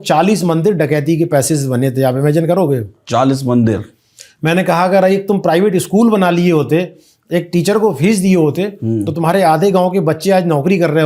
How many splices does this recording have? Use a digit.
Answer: 0